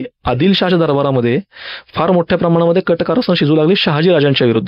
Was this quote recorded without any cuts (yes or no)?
yes